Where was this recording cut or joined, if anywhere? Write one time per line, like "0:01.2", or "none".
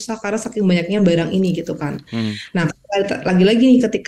none